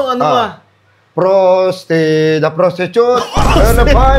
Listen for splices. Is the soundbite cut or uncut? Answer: uncut